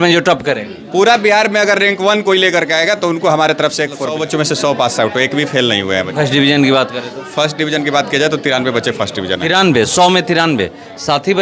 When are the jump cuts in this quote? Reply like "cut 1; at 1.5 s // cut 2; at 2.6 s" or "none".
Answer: cut 1; at 4.1 s